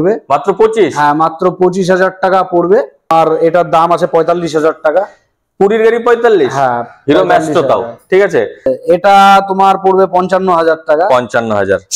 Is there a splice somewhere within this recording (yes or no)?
yes